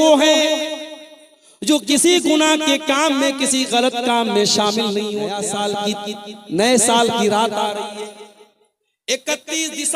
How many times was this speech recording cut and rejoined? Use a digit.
1